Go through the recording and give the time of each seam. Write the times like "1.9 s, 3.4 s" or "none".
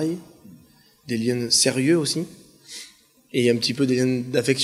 2.8 s